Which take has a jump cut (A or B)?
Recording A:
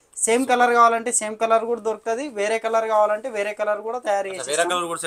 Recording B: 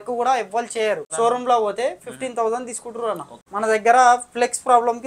B